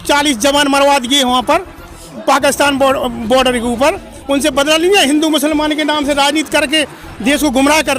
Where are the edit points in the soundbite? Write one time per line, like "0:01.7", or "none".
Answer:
none